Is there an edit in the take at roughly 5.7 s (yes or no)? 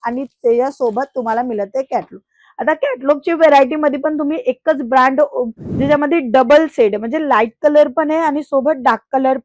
yes